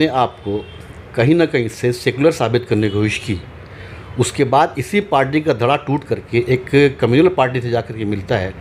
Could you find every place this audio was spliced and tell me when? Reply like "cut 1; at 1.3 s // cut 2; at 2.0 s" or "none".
none